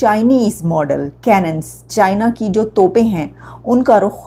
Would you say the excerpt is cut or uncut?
uncut